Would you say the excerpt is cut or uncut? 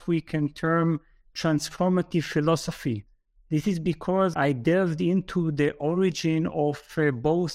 cut